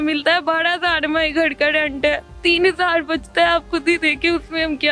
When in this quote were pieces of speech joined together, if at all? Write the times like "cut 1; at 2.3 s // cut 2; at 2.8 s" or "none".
cut 1; at 2.3 s